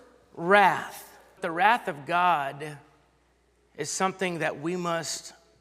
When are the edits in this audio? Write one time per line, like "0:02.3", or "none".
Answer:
0:01.4